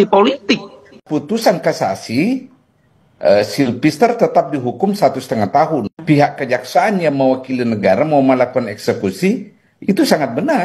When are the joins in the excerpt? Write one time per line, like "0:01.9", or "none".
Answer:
0:01.0
0:05.9